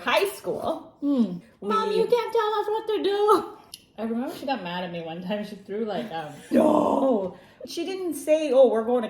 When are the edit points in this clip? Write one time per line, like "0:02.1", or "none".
0:01.5
0:03.6
0:06.5
0:07.6